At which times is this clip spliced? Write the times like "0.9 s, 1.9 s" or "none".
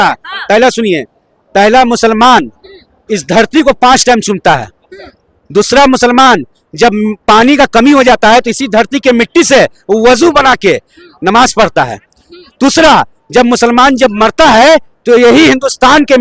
none